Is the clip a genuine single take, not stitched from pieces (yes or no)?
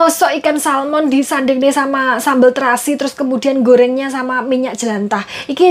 yes